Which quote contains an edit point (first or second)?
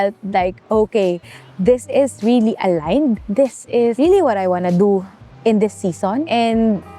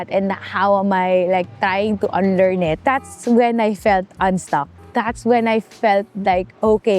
second